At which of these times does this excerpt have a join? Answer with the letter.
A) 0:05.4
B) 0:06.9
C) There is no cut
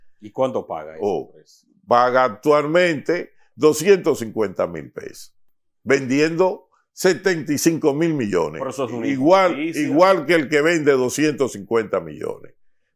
C